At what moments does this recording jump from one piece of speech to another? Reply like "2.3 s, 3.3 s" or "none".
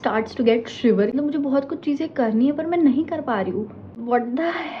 1.1 s, 3.8 s